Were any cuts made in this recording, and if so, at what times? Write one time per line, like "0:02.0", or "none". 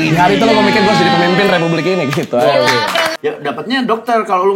0:03.1